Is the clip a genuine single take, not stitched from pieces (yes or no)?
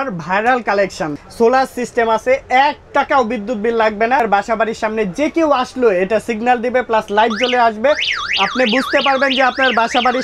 no